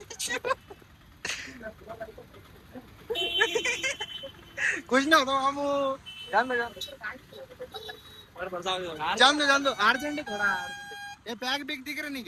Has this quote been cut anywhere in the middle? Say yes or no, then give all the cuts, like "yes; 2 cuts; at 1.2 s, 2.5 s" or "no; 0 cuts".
no; 0 cuts